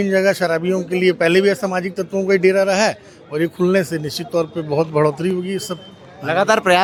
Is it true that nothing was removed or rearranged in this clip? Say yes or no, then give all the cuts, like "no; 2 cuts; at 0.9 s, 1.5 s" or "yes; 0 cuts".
yes; 0 cuts